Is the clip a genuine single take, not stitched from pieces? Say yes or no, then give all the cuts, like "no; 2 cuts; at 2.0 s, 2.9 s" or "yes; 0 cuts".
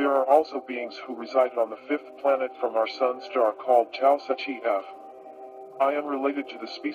no; 1 cut; at 2.5 s